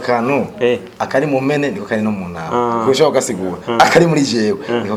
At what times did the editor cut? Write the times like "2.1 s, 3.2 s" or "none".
none